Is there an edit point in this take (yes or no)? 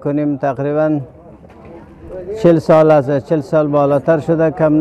no